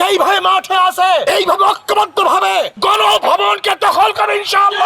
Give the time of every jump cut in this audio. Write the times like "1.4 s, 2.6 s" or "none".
1.2 s, 2.7 s